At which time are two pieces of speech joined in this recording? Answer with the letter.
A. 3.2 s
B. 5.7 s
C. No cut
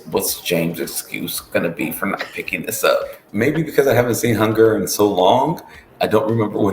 A